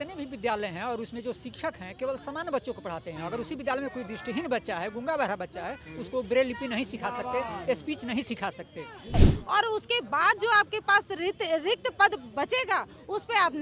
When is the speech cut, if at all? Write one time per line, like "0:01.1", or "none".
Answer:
0:09.2